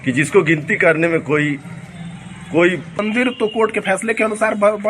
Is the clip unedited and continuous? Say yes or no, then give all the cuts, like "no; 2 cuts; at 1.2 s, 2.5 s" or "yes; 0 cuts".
no; 1 cut; at 3.0 s